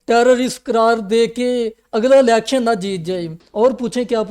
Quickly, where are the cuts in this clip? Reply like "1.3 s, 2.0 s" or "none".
3.4 s